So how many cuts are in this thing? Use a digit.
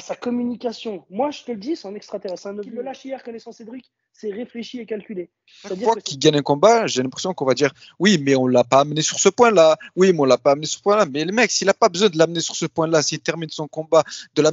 2